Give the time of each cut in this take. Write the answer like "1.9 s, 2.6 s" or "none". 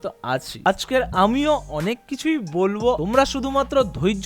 3.0 s